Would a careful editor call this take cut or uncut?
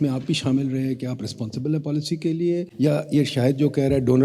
cut